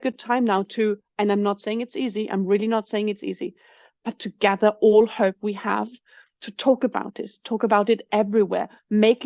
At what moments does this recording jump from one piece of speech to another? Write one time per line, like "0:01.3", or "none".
none